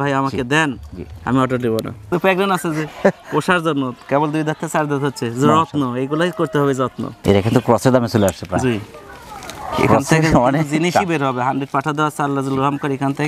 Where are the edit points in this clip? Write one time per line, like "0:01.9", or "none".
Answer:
0:02.0
0:07.1

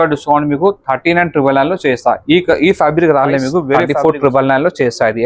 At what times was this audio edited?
0:03.8

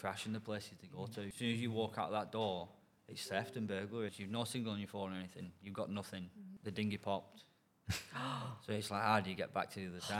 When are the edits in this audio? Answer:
0:01.3
0:04.2
0:06.5

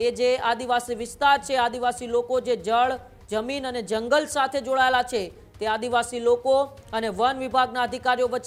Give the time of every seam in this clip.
none

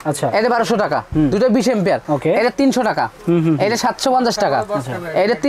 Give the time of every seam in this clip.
none

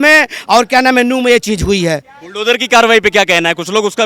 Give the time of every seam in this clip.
none

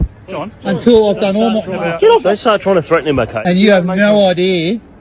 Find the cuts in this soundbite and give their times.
0:02.2
0:03.4

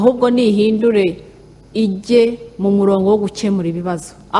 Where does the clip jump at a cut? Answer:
none

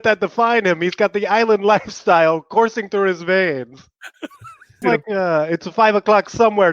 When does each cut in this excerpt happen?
0:04.8

